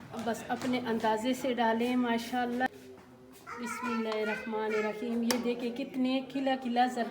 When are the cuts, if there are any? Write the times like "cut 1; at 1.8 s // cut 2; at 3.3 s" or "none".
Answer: cut 1; at 2.7 s